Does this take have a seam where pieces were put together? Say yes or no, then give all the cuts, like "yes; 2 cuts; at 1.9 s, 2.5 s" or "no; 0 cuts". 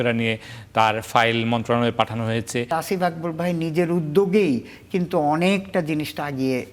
yes; 1 cut; at 2.7 s